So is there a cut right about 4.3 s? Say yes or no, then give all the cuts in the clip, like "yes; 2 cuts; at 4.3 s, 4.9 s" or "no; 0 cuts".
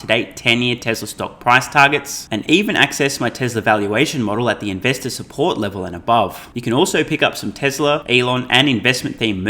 no; 2 cuts; at 6.5 s, 8.0 s